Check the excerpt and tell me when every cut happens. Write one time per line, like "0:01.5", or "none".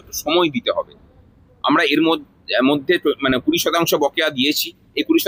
none